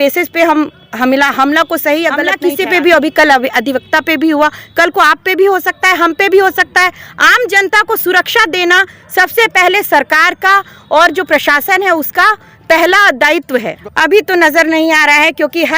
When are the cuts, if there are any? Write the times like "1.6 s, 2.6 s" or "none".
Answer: 2.3 s, 13.8 s